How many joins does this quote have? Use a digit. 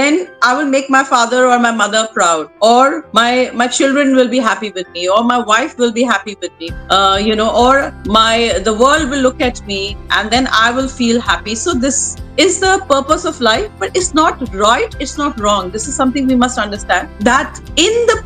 0